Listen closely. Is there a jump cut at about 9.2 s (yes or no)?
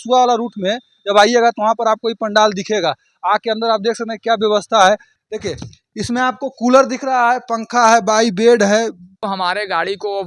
yes